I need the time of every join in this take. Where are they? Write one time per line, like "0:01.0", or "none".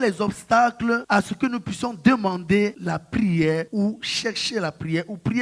0:01.0
0:02.8
0:03.7